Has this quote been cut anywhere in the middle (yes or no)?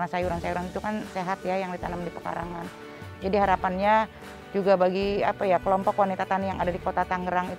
no